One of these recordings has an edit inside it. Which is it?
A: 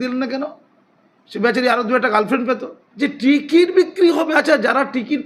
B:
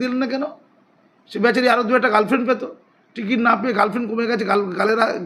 A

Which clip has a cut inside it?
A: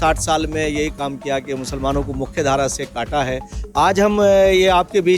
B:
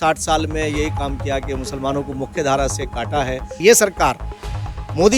B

